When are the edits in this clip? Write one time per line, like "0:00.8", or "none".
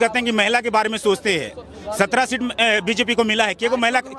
none